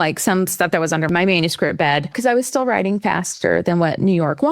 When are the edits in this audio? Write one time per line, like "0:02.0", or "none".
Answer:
0:01.1
0:02.2